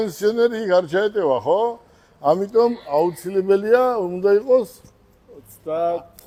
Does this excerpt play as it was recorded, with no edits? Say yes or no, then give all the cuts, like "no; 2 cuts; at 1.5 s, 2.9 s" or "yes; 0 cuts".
yes; 0 cuts